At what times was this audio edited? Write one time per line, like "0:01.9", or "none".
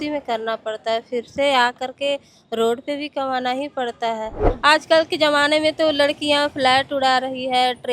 0:04.5